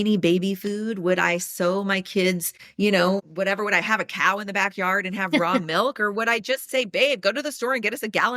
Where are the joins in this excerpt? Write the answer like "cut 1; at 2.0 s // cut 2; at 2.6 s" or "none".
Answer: none